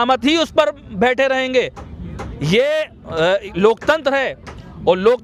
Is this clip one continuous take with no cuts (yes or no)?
yes